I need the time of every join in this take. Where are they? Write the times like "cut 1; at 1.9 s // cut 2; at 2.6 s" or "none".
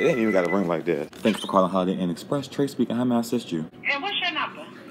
cut 1; at 3.8 s